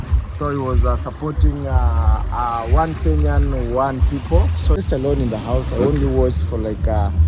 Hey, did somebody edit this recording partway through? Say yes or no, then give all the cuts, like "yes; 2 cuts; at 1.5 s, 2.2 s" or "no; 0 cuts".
yes; 1 cut; at 4.8 s